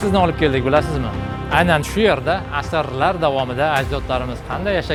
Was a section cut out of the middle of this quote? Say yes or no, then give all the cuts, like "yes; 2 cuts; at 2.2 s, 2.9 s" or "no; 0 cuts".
no; 0 cuts